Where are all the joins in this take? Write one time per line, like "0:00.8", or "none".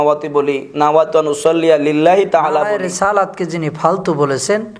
0:02.7